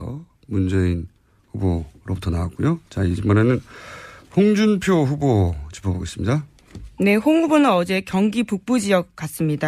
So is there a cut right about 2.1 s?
no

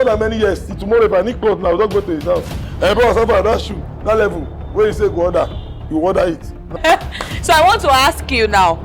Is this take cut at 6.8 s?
yes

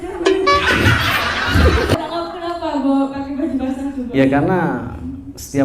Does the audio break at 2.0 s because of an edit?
yes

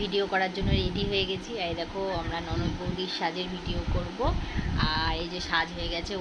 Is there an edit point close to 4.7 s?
no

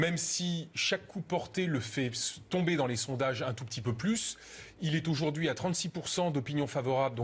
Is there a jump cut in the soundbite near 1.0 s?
no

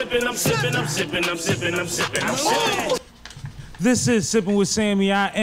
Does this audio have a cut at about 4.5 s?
no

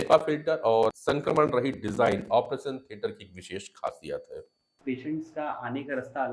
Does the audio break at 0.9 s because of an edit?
yes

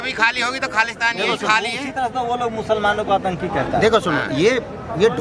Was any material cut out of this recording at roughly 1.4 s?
no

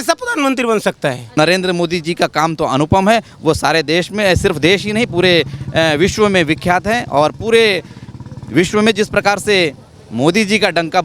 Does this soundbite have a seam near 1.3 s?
yes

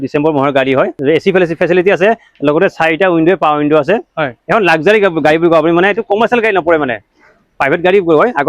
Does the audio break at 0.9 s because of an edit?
yes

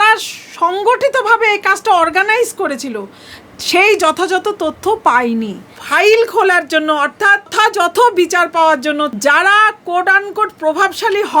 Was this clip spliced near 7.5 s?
yes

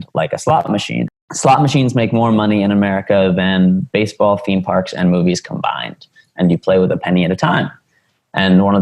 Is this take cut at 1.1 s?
yes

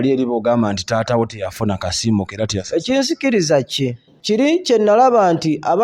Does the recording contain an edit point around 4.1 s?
yes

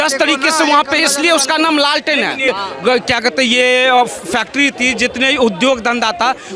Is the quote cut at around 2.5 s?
yes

